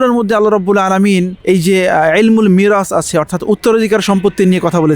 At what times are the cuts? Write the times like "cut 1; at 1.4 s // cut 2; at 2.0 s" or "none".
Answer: cut 1; at 1.3 s